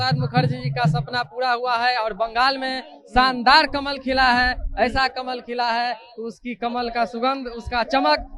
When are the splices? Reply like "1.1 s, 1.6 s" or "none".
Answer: none